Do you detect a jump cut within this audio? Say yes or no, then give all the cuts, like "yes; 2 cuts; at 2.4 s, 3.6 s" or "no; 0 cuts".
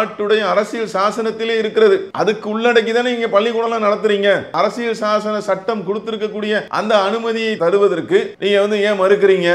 yes; 4 cuts; at 2.1 s, 4.5 s, 6.7 s, 8.3 s